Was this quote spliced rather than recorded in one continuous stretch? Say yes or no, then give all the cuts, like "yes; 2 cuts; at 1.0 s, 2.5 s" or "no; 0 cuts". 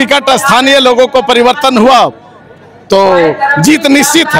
no; 0 cuts